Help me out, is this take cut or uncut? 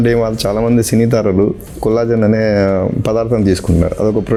uncut